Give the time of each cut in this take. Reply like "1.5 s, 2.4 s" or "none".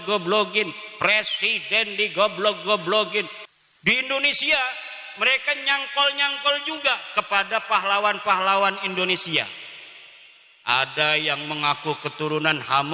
3.4 s